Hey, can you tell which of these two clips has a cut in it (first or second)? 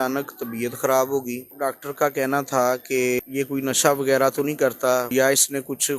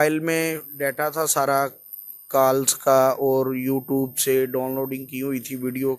first